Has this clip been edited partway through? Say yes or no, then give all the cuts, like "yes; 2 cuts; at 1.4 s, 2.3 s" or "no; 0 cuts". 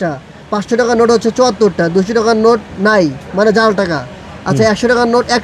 no; 0 cuts